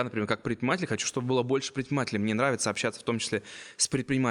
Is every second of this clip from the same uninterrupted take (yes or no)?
yes